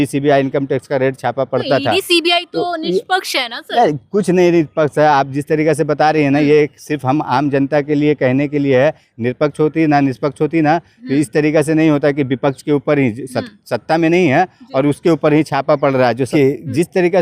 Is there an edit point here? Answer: yes; 1 cut; at 16.3 s

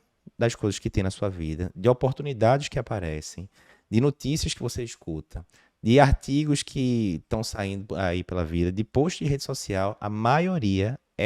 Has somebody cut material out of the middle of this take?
no; 0 cuts

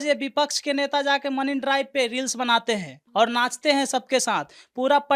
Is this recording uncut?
yes; 0 cuts

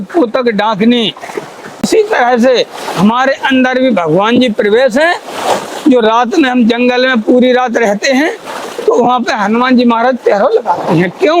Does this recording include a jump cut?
yes; 1 cut; at 1.8 s

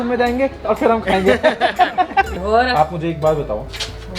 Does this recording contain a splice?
yes; 1 cut; at 2.3 s

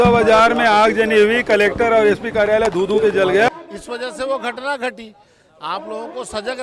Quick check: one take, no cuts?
no; 1 cut; at 3.5 s

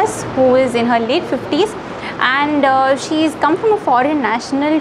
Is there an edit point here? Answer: no; 0 cuts

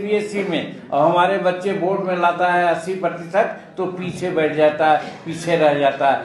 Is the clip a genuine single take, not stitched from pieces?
yes; 0 cuts

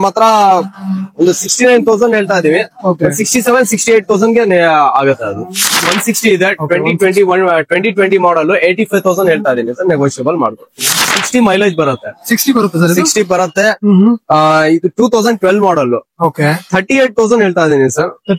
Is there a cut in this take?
yes; 2 cuts; at 5.7 s, 11.1 s

